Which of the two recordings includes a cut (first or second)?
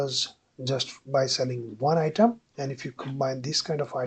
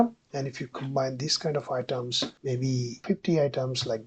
second